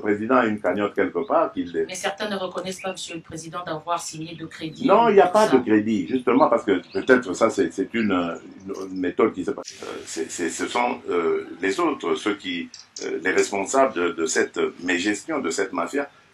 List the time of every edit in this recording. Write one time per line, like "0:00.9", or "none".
0:09.7